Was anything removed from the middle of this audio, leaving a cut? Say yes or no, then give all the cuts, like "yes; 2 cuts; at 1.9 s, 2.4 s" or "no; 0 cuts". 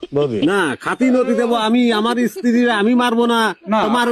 no; 0 cuts